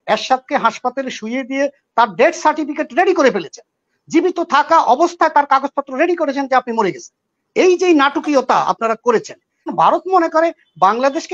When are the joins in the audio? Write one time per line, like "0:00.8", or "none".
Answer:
0:09.7